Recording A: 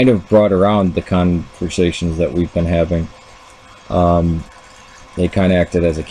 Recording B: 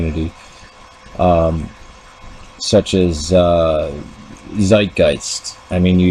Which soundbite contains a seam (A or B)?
A